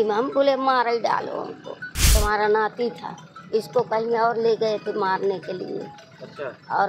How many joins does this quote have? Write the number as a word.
one